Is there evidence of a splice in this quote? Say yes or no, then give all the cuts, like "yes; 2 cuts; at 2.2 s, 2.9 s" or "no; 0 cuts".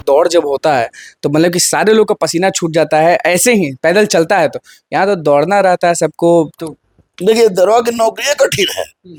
no; 0 cuts